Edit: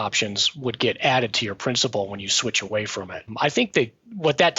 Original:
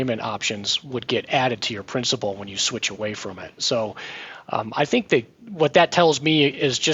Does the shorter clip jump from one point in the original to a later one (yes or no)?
yes